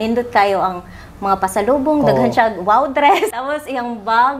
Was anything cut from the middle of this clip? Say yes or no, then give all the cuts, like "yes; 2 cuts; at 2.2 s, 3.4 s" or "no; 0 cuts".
yes; 1 cut; at 3.3 s